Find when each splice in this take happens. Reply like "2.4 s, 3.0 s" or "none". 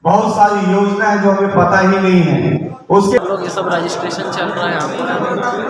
3.2 s